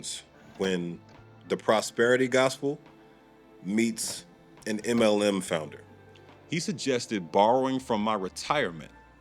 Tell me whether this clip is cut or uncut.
cut